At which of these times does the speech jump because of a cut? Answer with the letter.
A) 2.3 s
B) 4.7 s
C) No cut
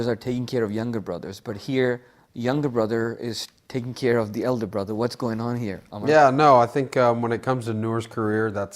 B